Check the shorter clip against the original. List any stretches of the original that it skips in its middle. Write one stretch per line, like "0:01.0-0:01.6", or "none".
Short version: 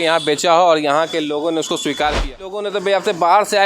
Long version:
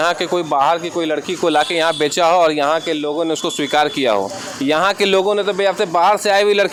0:04.1-0:05.1